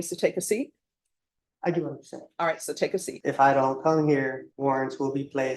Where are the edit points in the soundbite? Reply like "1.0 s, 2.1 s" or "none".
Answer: 3.1 s, 4.5 s